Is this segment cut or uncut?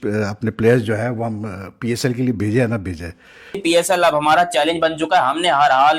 cut